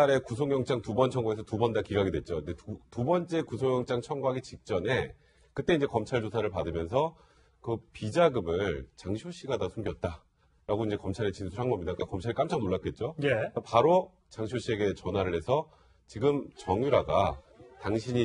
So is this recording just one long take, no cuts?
yes; 0 cuts

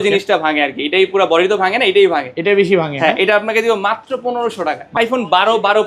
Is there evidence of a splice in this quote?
yes; 1 cut; at 5.0 s

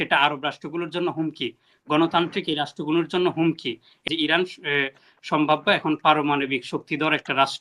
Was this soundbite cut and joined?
yes; 1 cut; at 4.1 s

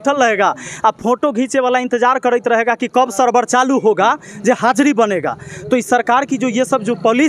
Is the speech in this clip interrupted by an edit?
no; 0 cuts

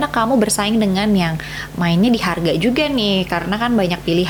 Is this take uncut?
yes; 0 cuts

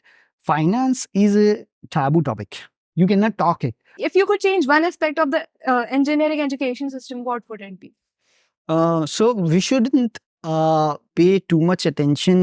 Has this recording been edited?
yes; 1 cut; at 4.0 s

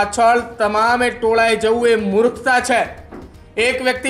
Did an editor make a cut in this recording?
no; 0 cuts

